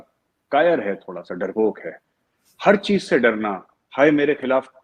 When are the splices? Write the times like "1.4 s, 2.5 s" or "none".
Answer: none